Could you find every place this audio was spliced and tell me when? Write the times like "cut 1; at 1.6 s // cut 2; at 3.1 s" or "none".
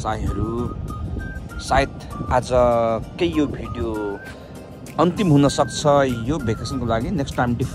none